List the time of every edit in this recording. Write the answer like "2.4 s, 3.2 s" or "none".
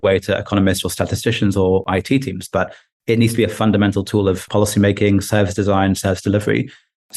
1.9 s, 4.4 s